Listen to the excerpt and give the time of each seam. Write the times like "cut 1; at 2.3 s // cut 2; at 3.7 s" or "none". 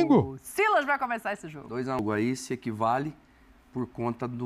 cut 1; at 2.0 s